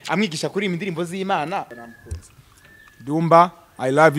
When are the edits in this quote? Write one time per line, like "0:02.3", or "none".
0:01.8